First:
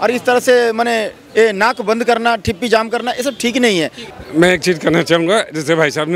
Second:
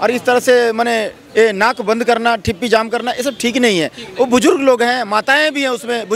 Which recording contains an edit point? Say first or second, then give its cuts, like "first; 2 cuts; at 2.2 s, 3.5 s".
first; 1 cut; at 4.0 s